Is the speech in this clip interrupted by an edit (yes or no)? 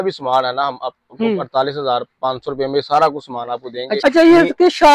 yes